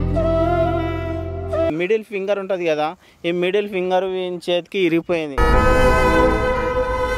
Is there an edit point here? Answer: yes; 1 cut; at 1.7 s

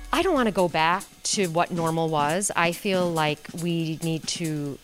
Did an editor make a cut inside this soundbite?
yes; 1 cut; at 1.2 s

